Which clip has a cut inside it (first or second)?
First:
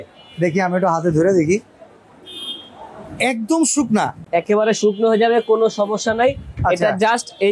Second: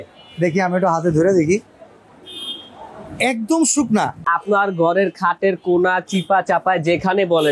second